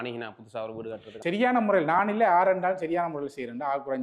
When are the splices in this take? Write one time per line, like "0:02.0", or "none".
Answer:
0:01.2